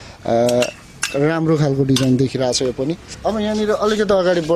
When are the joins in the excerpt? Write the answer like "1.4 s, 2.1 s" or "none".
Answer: none